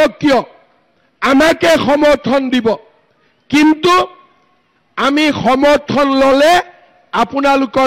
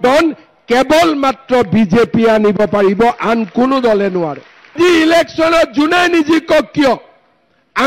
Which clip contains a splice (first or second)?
second